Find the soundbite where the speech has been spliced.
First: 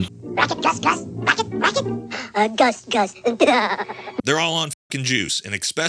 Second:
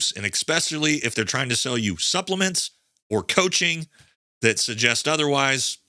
first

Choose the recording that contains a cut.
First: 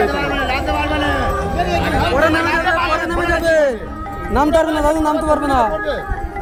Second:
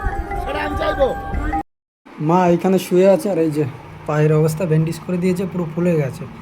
second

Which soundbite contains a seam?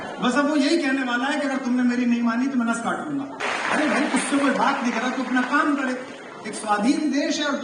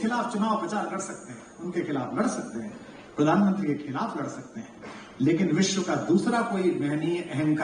first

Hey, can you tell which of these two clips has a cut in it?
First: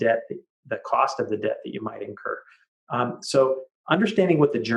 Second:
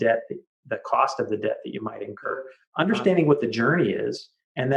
second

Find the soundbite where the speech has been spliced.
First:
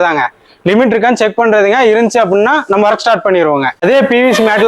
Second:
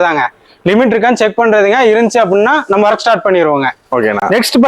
first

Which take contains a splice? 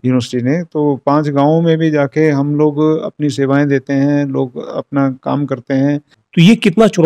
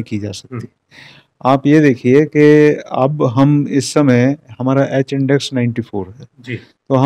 first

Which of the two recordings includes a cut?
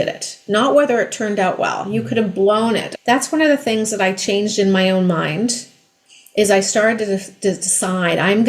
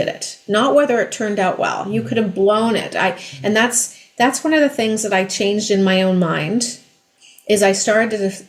first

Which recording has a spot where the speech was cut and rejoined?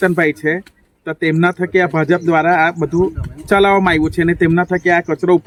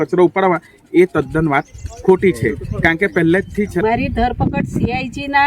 second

